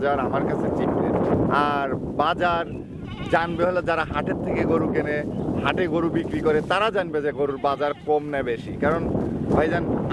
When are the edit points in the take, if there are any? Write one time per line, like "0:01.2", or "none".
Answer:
0:01.4